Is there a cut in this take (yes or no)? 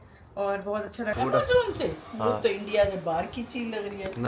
yes